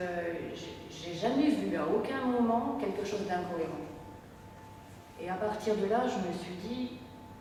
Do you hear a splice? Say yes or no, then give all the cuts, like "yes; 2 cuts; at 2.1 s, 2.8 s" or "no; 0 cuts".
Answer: no; 0 cuts